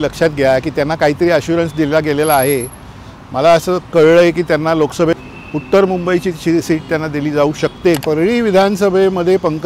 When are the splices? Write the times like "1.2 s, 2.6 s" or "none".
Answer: 5.2 s, 8.0 s